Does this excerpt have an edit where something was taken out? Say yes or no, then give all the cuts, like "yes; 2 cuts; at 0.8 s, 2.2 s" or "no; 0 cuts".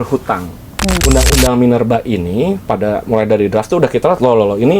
yes; 1 cut; at 1.0 s